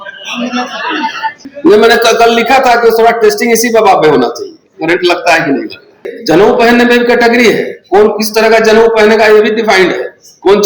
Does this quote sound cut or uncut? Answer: cut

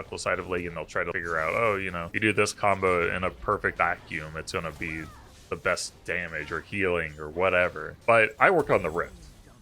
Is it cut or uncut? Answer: cut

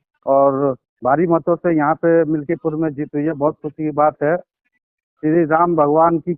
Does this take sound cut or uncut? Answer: uncut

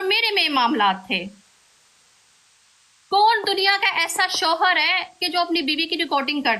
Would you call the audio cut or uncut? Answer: uncut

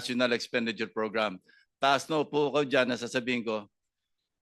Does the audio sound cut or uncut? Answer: uncut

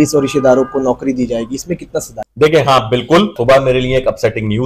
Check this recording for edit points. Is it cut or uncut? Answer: cut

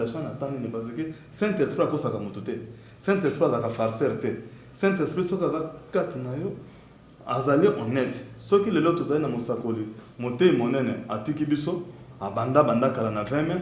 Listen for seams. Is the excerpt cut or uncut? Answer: uncut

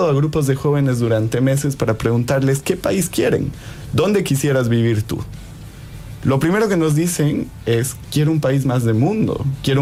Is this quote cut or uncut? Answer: uncut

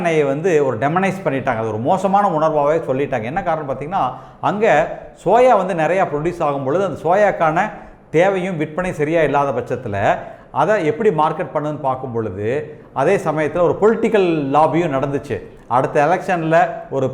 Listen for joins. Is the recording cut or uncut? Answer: uncut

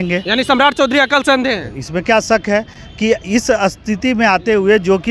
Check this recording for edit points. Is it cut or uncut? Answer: uncut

